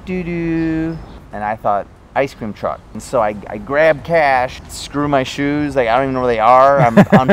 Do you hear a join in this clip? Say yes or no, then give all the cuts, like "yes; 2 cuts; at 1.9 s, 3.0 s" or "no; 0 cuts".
yes; 3 cuts; at 1.2 s, 3.0 s, 4.6 s